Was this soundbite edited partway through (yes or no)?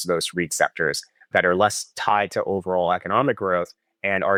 no